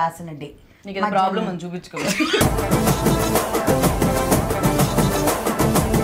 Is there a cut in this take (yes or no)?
no